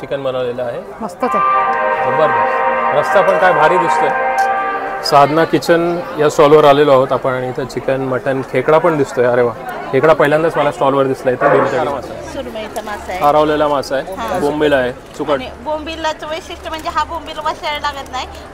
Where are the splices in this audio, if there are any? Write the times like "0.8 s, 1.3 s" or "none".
4.7 s, 11.9 s